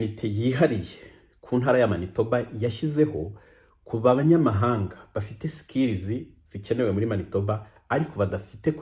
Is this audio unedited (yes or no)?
yes